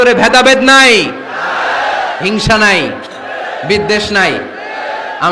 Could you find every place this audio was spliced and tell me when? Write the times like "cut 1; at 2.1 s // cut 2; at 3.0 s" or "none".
none